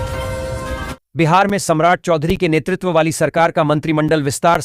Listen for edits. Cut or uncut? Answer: cut